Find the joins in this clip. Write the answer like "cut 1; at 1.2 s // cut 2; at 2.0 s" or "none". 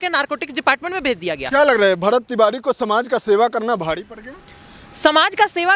cut 1; at 1.4 s